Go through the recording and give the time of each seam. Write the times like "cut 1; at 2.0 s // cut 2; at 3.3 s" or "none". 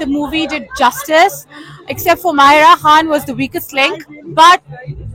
none